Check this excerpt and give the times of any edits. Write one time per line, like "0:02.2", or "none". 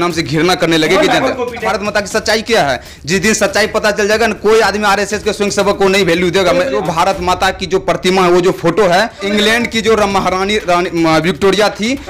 0:01.7
0:06.8
0:09.2